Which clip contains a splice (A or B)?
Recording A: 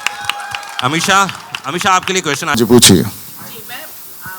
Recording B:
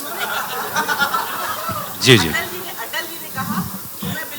A